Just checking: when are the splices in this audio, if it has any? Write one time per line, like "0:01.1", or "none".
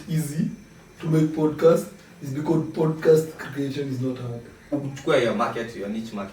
0:04.7